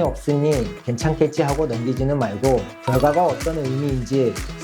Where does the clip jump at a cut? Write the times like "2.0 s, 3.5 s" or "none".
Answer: 2.7 s